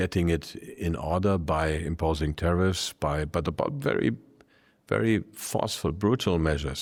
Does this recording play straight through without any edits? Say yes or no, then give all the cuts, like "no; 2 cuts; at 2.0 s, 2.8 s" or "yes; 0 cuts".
yes; 0 cuts